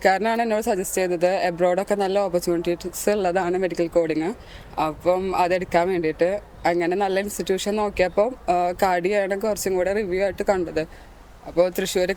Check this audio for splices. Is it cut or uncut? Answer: uncut